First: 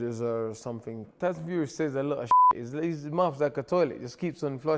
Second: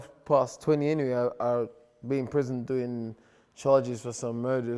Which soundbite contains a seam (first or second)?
first